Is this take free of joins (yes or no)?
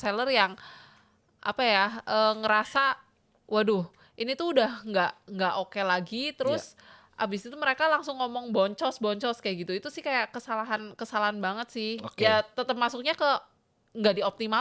yes